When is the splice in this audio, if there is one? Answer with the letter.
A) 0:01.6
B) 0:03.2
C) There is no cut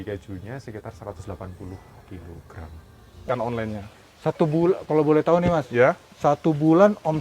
B